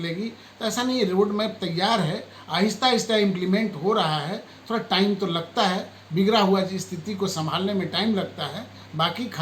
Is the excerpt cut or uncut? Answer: uncut